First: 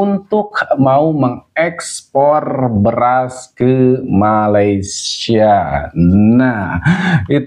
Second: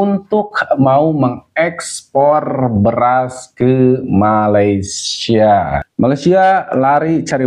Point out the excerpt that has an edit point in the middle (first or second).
second